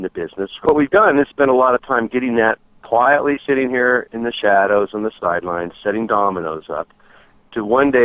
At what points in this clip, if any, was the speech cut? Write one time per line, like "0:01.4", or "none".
0:00.7
0:02.7